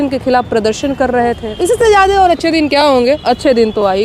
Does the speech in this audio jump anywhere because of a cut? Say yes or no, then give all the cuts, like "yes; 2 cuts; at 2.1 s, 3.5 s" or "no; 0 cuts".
yes; 1 cut; at 1.5 s